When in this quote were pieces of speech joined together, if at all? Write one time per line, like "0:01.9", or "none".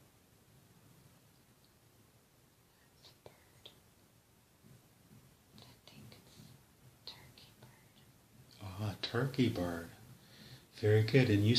0:02.3